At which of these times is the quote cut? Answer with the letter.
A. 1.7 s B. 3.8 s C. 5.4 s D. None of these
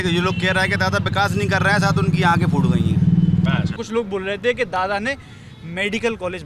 B